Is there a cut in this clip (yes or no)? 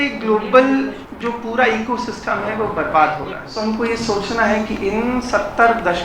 yes